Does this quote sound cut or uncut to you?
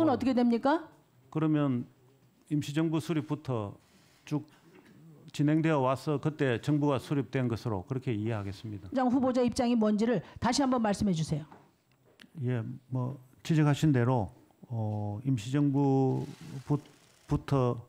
cut